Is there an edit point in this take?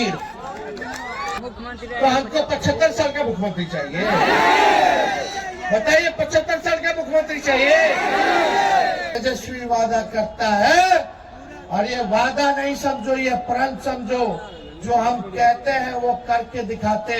yes; 2 cuts; at 1.4 s, 9.1 s

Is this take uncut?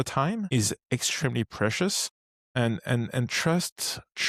yes; 0 cuts

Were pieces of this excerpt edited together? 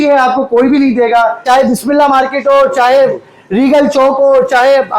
yes; 1 cut; at 1.4 s

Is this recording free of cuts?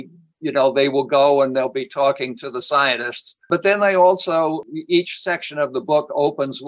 yes; 0 cuts

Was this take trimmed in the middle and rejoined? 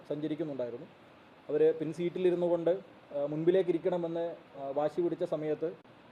no; 0 cuts

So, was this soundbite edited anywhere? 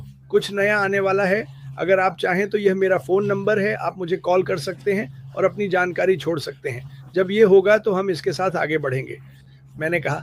no; 0 cuts

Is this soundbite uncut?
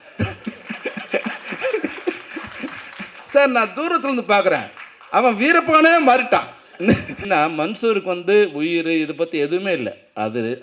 no; 1 cut; at 7.2 s

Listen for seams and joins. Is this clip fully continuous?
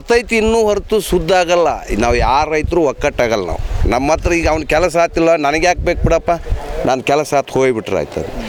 yes; 0 cuts

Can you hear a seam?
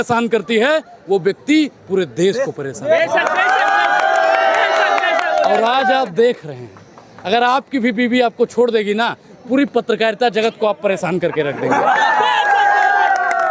no; 0 cuts

